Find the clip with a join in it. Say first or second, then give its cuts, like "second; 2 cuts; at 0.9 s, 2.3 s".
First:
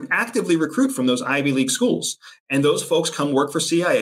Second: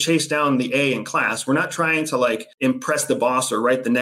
second; 1 cut; at 2.5 s